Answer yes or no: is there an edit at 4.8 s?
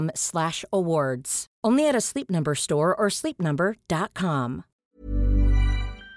yes